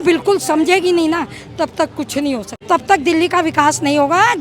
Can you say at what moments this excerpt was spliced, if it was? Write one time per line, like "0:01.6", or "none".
0:02.5